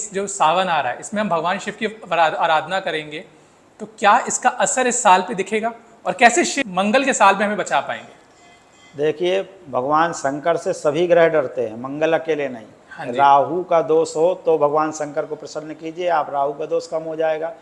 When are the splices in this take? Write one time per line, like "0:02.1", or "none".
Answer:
none